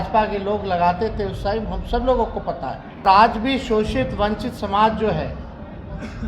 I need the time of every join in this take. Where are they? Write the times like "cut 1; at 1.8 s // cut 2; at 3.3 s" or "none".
cut 1; at 3.0 s